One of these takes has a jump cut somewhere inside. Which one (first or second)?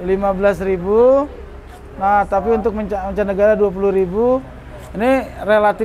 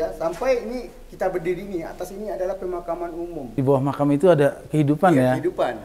second